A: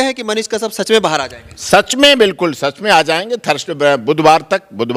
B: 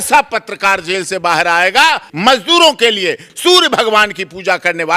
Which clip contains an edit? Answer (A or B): B